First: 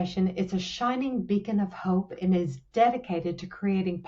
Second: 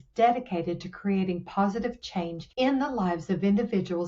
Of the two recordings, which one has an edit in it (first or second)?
second